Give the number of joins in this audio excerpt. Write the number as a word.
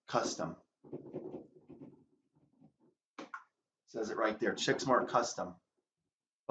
one